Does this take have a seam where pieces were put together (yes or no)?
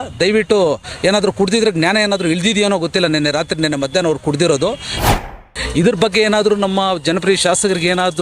yes